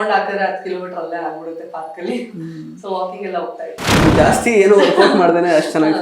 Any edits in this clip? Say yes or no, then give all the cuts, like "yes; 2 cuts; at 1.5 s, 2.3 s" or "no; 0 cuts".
yes; 1 cut; at 3.9 s